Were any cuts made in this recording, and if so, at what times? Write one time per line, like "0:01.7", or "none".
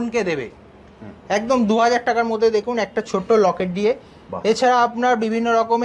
none